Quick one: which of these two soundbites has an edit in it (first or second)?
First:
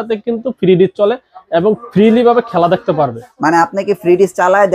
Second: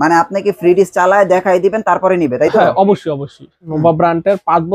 second